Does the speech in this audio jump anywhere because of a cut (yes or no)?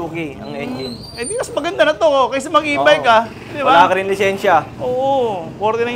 no